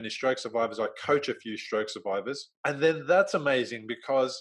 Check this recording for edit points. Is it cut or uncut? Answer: cut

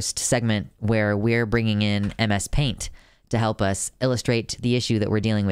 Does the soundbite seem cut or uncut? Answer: uncut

